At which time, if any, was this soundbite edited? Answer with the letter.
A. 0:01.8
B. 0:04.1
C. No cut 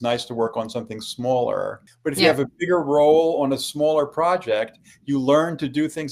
A